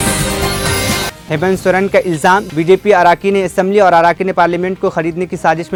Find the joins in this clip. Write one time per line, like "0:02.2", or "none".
none